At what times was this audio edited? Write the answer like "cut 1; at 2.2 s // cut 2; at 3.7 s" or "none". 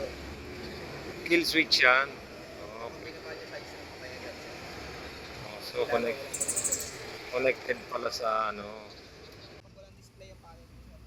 cut 1; at 9.7 s